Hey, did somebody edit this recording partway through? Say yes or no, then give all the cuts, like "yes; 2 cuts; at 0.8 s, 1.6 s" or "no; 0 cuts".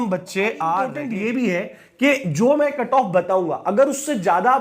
yes; 1 cut; at 1.0 s